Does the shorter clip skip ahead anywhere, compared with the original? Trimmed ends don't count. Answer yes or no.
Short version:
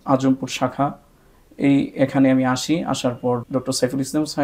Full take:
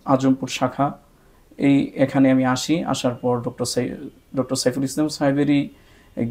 yes